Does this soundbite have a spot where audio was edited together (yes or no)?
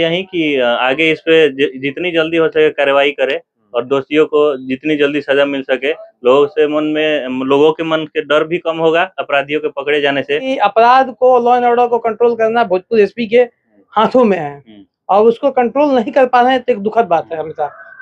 yes